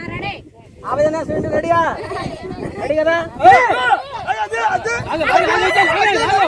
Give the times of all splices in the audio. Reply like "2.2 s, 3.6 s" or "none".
3.4 s